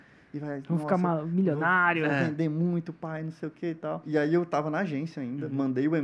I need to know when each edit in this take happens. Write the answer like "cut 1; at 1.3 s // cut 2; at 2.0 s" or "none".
cut 1; at 4.0 s

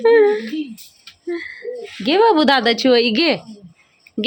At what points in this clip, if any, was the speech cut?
none

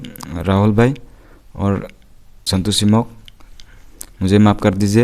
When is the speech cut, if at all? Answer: cut 1; at 2.3 s

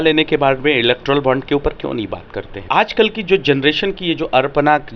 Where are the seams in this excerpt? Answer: cut 1; at 2.7 s

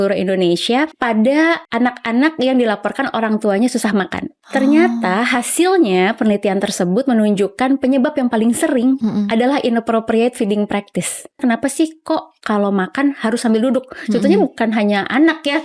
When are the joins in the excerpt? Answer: cut 1; at 1.0 s // cut 2; at 1.7 s // cut 3; at 11.4 s

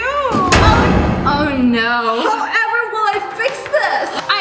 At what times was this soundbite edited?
cut 1; at 1.2 s

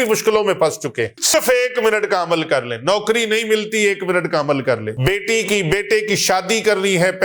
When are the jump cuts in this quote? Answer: cut 1; at 1.3 s // cut 2; at 4.9 s

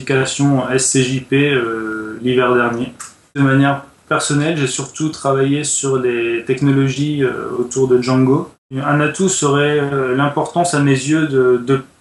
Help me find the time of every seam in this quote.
cut 1; at 3.3 s // cut 2; at 8.6 s

